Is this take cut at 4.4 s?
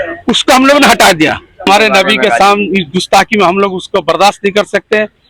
no; 1 cut; at 1.7 s

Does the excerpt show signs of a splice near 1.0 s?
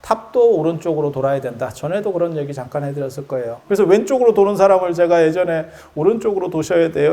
no; 1 cut; at 3.5 s

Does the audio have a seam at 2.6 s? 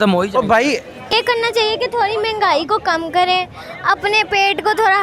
no; 1 cut; at 1.1 s

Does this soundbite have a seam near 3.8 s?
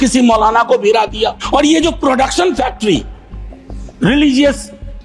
no; 1 cut; at 1.4 s

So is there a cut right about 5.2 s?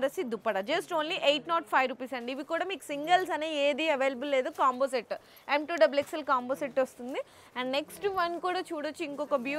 no; 0 cuts

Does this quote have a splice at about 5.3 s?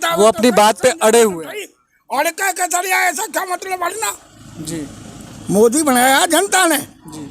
yes; 1 cut; at 5.3 s

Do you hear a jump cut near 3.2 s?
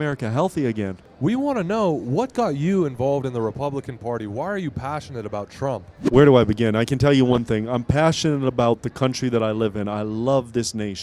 no; 2 cuts; at 1.0 s, 5.9 s

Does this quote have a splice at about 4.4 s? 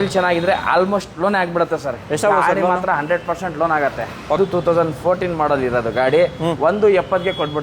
yes; 1 cut; at 4.4 s

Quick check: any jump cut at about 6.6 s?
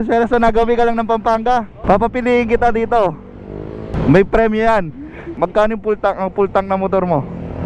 no; 3 cuts; at 1.7 s, 3.9 s, 5.3 s

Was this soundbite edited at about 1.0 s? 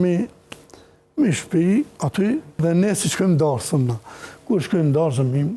no; 1 cut; at 2.6 s

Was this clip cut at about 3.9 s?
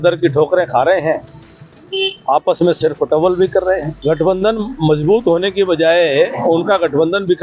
yes; 1 cut; at 3.9 s

